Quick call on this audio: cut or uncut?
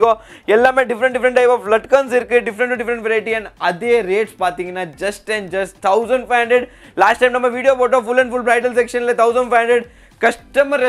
uncut